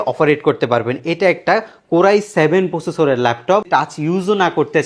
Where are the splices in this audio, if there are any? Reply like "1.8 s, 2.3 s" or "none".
3.7 s